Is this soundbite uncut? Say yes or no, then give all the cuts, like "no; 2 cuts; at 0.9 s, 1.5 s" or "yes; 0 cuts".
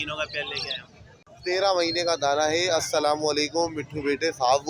no; 1 cut; at 1.3 s